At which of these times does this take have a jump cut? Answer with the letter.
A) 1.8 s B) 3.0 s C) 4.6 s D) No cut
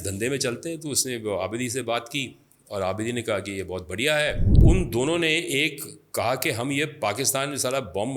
C